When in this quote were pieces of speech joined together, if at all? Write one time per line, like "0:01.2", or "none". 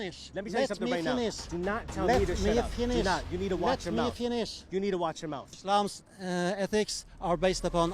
0:05.6